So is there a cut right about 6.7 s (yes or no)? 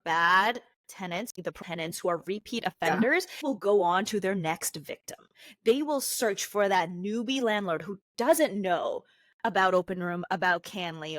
no